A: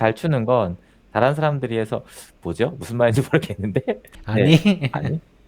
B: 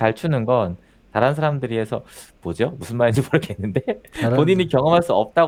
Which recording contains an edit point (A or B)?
A